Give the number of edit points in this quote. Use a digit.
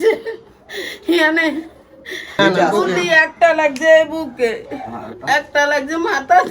1